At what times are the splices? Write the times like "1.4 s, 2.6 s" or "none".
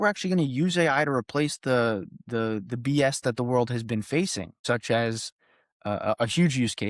4.5 s

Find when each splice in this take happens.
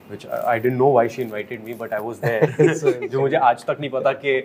none

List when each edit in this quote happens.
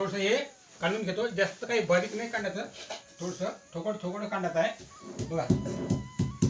none

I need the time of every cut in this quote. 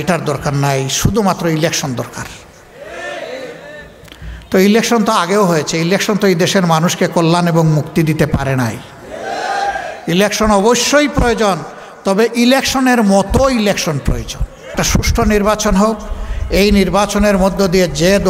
14.7 s

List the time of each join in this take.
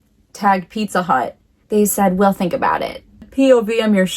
3.3 s

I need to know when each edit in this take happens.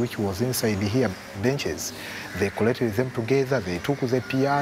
1.6 s, 3.7 s

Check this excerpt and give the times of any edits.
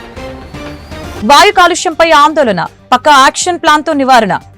1.1 s

